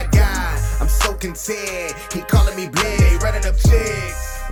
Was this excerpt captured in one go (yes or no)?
yes